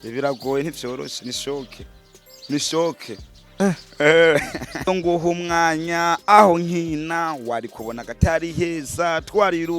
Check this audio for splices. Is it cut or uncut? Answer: cut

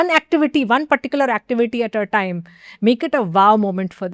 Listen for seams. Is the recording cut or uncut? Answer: uncut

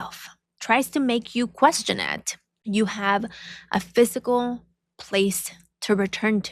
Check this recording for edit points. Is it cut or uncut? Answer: uncut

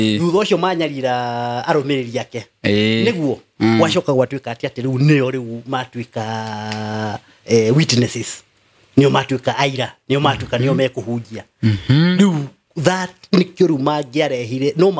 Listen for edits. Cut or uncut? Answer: uncut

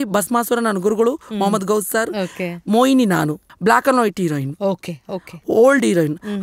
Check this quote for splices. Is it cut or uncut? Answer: cut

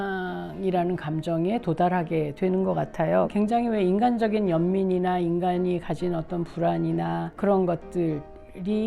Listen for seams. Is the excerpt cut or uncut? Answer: cut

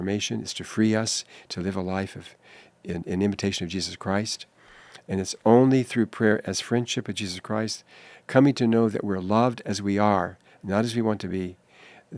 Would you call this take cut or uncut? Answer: uncut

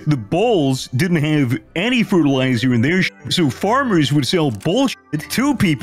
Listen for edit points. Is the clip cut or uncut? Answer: uncut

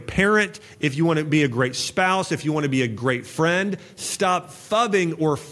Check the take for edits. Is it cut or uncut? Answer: uncut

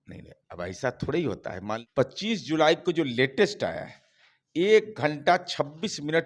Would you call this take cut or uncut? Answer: cut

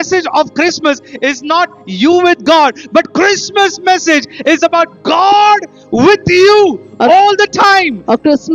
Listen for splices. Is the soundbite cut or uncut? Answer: uncut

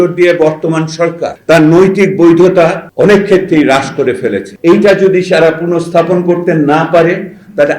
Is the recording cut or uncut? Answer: cut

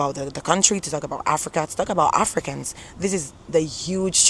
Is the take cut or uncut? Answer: uncut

